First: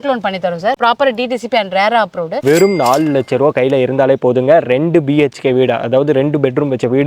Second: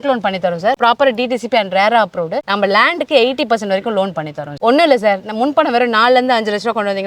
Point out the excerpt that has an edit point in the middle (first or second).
first